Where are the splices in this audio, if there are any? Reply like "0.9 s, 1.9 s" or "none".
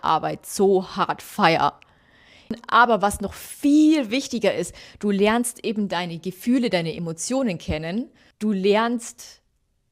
2.5 s, 8.2 s